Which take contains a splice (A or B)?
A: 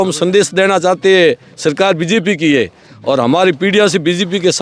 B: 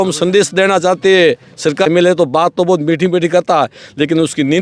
B